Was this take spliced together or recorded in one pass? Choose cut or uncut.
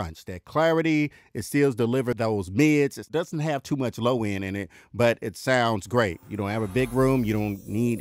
cut